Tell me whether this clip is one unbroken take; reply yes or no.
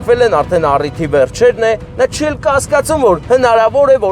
yes